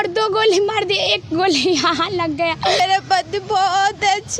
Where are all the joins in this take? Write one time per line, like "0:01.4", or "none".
0:02.8